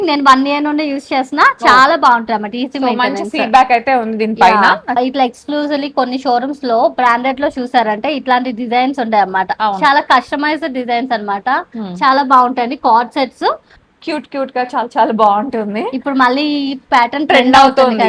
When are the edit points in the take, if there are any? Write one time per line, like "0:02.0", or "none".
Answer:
0:05.0
0:13.7